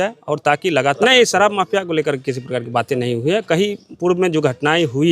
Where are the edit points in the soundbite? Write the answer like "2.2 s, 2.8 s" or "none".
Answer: 1.0 s